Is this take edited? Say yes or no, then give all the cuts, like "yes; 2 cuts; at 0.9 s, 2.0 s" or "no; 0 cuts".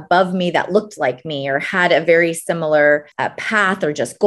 yes; 1 cut; at 3.2 s